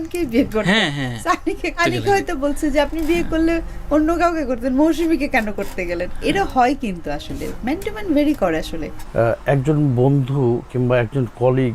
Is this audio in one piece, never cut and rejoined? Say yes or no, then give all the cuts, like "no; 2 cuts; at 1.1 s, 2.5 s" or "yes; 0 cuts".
yes; 0 cuts